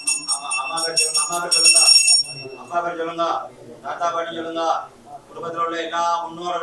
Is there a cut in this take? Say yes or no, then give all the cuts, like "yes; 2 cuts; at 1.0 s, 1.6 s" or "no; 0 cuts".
no; 0 cuts